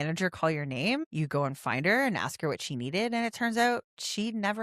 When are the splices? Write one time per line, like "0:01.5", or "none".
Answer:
0:01.1